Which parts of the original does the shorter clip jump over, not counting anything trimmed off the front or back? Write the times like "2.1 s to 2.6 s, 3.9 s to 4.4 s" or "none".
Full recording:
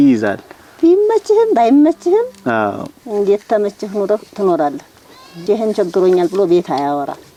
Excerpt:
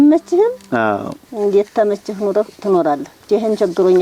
4.9 s to 5.3 s